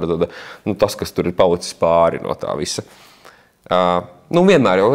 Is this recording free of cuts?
yes; 0 cuts

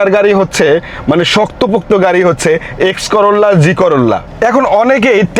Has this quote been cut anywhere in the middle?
yes; 1 cut; at 4.3 s

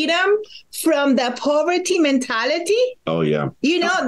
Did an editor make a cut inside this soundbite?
no; 0 cuts

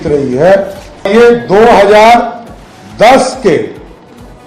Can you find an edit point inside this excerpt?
yes; 1 cut; at 1.1 s

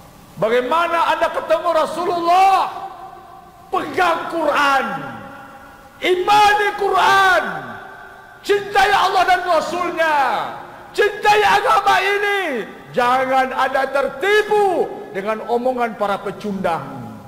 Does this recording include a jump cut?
no; 0 cuts

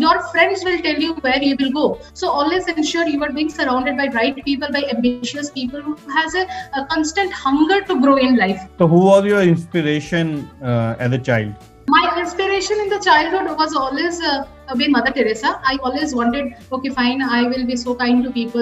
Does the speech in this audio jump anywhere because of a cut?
no; 0 cuts

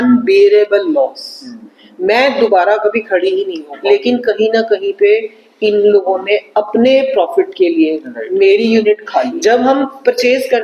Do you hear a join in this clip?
yes; 2 cuts; at 3.7 s, 9.3 s

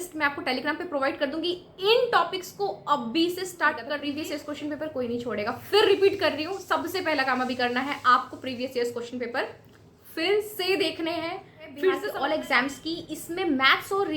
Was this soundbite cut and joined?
yes; 2 cuts; at 4.0 s, 12.1 s

